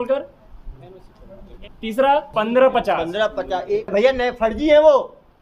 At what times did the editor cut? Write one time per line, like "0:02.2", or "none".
0:01.5
0:02.3
0:03.9